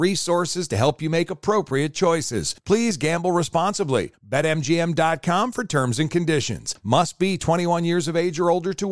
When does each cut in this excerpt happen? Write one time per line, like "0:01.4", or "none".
none

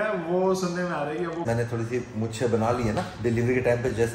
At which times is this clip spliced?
0:01.5

